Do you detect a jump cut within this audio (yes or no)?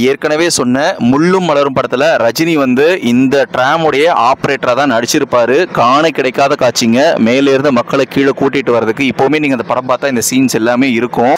no